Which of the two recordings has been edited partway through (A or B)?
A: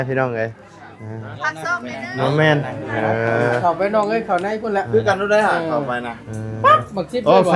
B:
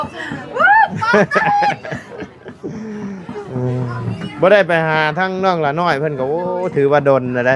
A